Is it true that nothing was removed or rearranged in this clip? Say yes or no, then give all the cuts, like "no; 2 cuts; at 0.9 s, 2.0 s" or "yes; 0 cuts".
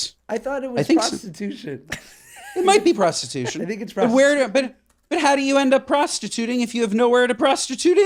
yes; 0 cuts